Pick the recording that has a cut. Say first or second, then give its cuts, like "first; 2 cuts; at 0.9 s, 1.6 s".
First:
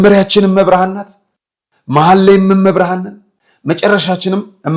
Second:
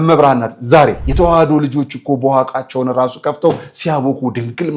second; 1 cut; at 1.0 s